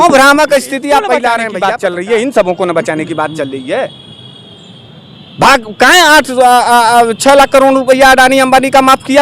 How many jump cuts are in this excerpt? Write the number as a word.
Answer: one